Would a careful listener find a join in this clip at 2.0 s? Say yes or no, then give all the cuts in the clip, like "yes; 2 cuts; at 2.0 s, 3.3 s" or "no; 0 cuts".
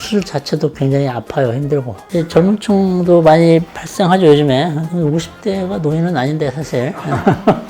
yes; 1 cut; at 2.0 s